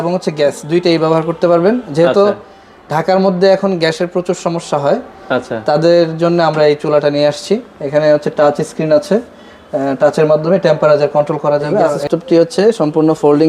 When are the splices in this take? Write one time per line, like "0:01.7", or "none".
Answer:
0:12.0